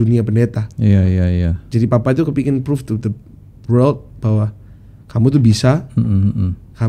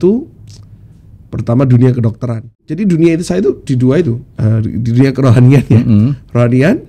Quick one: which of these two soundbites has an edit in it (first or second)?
second